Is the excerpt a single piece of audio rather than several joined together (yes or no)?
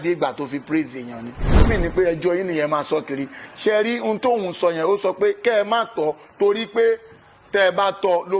no